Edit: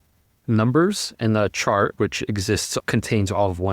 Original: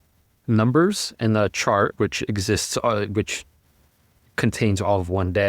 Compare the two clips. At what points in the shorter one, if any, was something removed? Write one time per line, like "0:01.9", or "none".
0:02.7